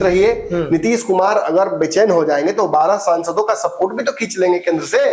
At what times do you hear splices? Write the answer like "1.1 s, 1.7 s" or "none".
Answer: none